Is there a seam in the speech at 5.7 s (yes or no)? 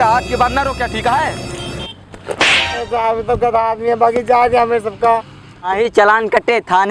yes